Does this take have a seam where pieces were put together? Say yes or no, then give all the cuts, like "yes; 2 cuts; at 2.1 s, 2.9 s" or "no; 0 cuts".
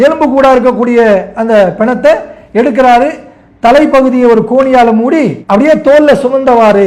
no; 0 cuts